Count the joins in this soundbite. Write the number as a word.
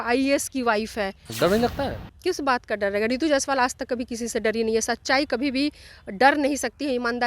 one